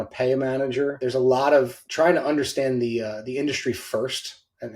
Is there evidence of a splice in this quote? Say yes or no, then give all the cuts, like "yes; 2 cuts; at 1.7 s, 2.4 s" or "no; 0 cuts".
yes; 2 cuts; at 1.0 s, 1.8 s